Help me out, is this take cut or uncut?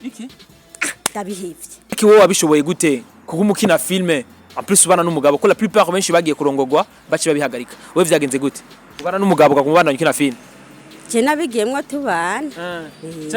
cut